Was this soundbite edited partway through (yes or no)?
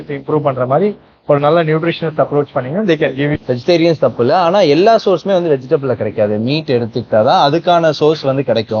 yes